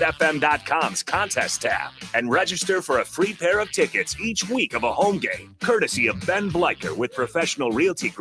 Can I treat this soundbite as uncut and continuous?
yes; 0 cuts

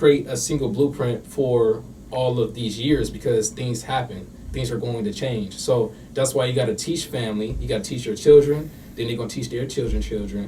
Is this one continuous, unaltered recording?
yes; 0 cuts

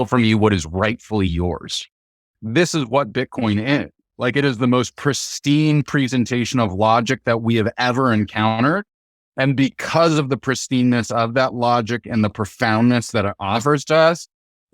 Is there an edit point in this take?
yes; 1 cut; at 2.4 s

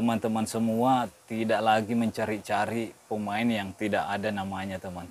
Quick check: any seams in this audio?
no; 0 cuts

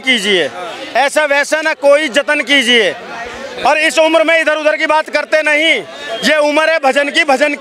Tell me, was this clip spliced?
no; 0 cuts

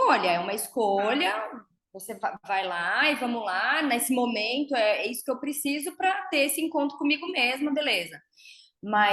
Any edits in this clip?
no; 0 cuts

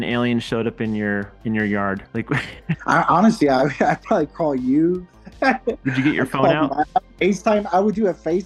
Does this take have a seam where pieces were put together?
yes; 1 cut; at 2.7 s

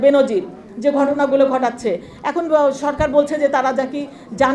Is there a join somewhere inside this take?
no; 0 cuts

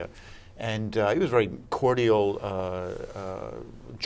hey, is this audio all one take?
no; 1 cut; at 1.6 s

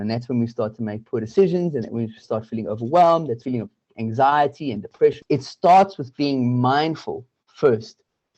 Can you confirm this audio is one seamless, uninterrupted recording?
no; 2 cuts; at 3.5 s, 5.2 s

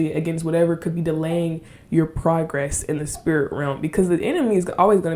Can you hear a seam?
no; 0 cuts

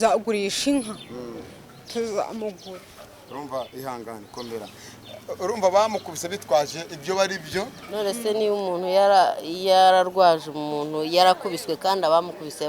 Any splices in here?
yes; 2 cuts; at 2.6 s, 7.8 s

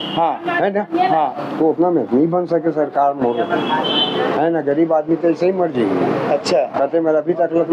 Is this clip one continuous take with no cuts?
yes; 0 cuts

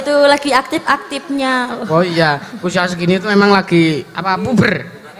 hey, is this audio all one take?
yes; 0 cuts

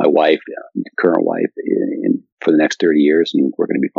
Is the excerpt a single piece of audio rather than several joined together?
no; 1 cut; at 2.3 s

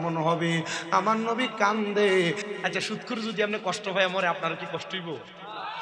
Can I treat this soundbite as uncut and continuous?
no; 1 cut; at 2.5 s

